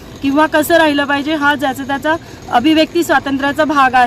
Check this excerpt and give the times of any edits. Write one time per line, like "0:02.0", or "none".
none

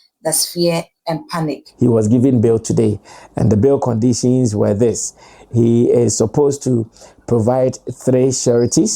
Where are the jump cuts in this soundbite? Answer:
0:01.6

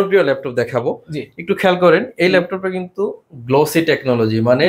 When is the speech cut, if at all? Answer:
none

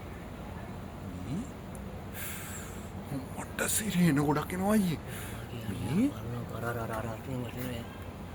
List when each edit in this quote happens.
none

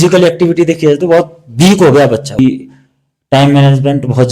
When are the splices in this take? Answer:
0:02.4

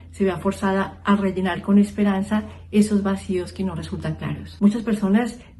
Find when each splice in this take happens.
0:04.5

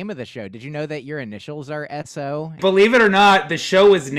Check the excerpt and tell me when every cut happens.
0:02.6

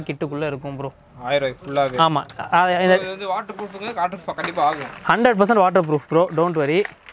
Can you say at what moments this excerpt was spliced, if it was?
none

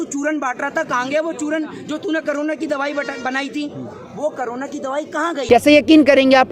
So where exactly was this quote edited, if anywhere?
0:05.4

